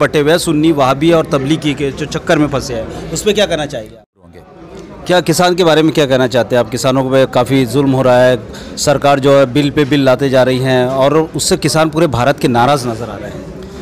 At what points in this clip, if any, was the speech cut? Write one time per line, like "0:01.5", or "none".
0:04.2